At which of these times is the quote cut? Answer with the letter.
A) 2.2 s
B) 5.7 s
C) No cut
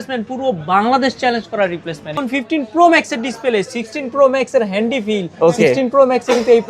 A